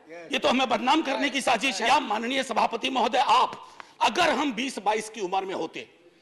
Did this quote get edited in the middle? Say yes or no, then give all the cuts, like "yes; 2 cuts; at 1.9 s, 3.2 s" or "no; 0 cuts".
yes; 1 cut; at 1.8 s